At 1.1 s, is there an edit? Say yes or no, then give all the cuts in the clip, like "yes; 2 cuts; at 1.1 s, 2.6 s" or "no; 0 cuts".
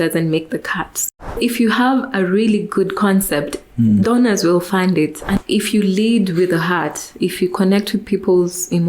yes; 2 cuts; at 1.1 s, 5.4 s